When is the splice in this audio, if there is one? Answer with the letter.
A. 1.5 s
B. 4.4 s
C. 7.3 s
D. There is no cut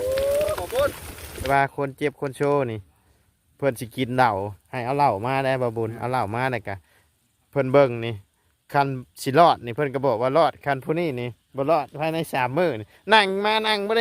A